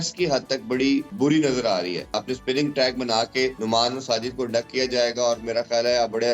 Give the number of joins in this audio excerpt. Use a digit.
3